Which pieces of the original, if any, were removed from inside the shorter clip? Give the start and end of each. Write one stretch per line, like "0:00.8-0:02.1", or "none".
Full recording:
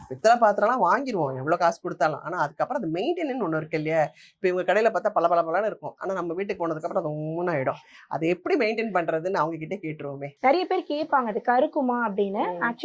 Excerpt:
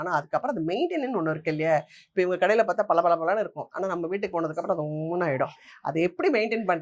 none